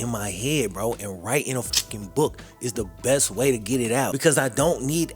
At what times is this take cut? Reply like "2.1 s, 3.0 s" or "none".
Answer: 4.1 s